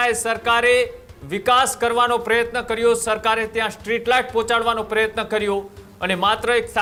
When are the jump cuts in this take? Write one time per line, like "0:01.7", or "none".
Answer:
none